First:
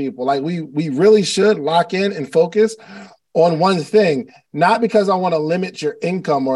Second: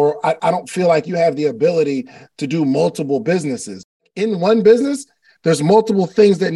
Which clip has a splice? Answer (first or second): second